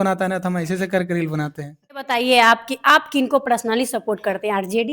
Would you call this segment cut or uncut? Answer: cut